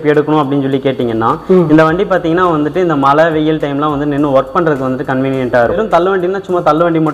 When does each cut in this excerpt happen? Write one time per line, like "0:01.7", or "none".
0:05.8